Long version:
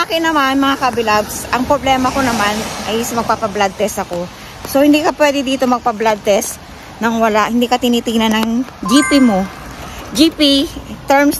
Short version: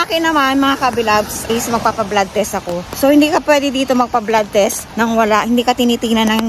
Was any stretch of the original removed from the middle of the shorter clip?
yes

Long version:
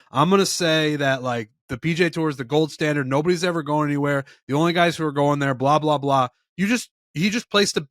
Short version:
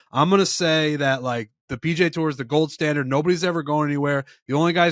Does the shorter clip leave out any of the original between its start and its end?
no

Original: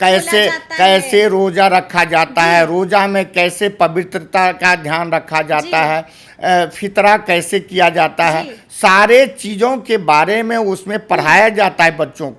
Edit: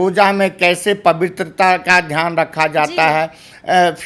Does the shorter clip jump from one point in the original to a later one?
no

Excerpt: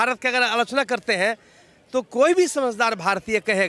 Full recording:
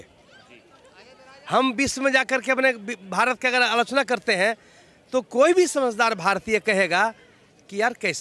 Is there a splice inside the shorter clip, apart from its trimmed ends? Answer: no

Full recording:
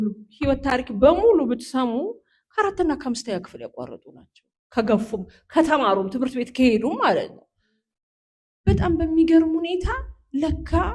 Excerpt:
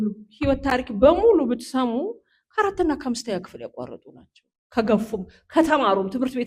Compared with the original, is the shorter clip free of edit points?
yes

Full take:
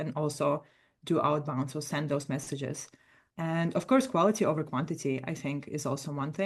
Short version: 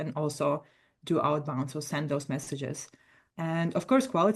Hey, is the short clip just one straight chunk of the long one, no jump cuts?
yes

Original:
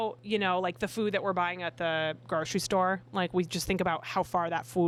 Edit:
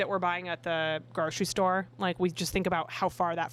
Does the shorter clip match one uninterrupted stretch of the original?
yes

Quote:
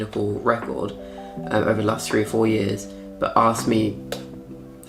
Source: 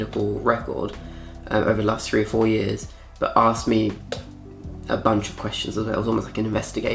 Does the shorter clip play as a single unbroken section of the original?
yes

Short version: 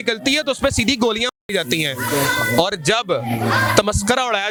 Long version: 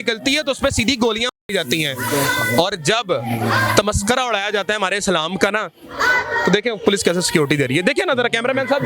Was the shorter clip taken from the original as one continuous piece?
yes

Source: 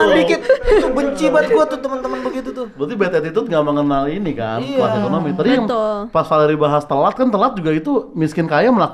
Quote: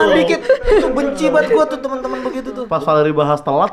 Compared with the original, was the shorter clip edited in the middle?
yes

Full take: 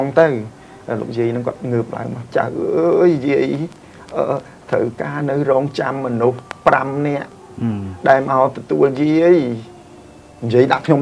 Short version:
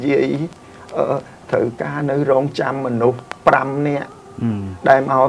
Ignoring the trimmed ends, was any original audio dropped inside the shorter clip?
no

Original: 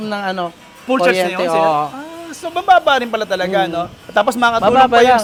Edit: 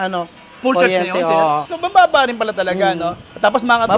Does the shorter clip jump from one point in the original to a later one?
yes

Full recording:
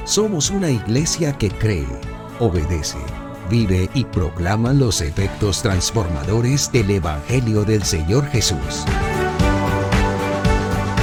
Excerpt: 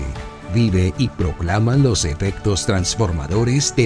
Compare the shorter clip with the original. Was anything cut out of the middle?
no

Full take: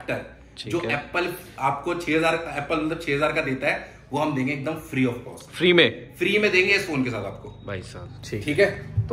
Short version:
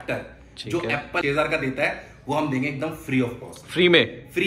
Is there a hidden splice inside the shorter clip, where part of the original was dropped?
yes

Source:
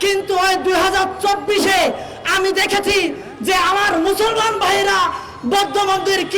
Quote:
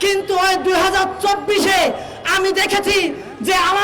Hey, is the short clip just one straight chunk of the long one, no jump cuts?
yes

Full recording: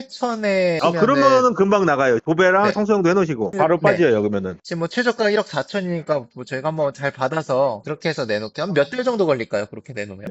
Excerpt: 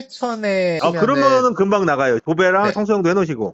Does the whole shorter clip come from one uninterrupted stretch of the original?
yes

